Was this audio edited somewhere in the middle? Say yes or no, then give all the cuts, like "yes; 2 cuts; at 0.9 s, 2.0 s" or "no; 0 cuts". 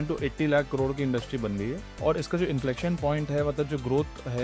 yes; 1 cut; at 2.0 s